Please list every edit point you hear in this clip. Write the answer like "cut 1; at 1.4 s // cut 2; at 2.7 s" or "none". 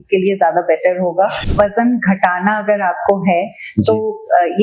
cut 1; at 1.4 s